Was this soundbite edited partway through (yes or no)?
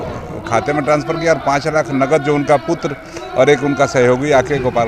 no